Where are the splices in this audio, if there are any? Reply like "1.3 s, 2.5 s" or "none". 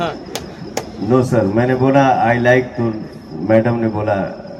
none